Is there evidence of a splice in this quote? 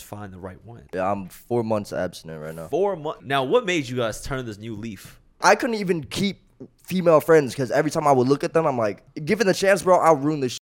yes; 4 cuts; at 0.8 s, 3.2 s, 5.4 s, 9.0 s

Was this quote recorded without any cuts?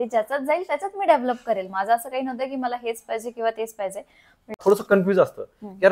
no; 1 cut; at 4.6 s

